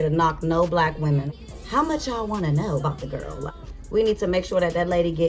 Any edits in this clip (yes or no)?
yes